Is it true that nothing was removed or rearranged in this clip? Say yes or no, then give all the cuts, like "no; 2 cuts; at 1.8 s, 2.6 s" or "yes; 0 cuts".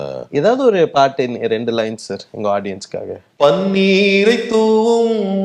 no; 1 cut; at 3.2 s